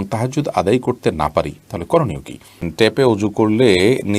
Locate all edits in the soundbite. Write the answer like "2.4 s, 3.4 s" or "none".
2.7 s